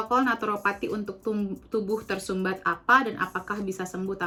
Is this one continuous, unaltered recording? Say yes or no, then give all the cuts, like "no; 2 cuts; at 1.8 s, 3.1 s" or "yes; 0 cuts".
yes; 0 cuts